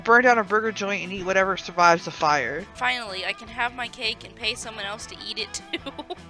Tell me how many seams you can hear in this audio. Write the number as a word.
one